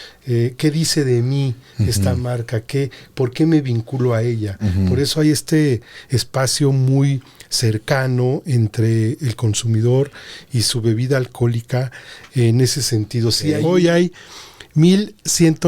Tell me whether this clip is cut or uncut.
cut